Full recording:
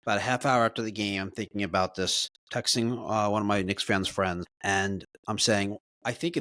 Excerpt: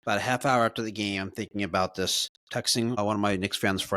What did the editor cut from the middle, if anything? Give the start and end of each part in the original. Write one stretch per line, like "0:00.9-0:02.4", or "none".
0:03.0-0:03.2

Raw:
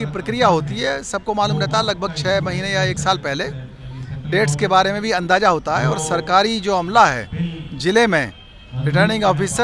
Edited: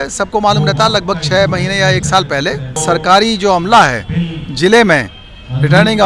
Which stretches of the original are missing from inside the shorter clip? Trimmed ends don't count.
0:03.7-0:06.0

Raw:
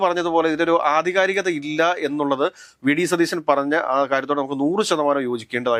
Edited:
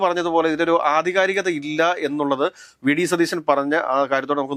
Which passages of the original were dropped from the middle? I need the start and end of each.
none

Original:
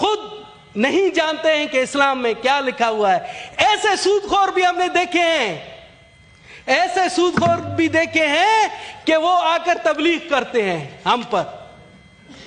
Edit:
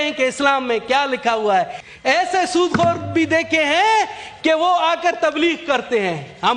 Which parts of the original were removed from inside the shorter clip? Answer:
0:03.4-0:06.5

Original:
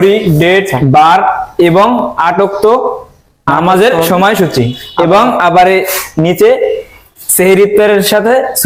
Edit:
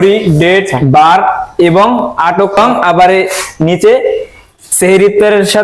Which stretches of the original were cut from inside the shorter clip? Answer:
0:02.6-0:05.1

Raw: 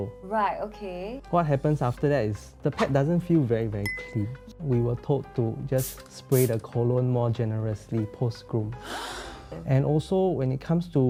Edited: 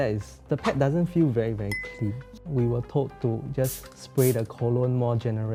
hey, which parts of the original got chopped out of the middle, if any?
none

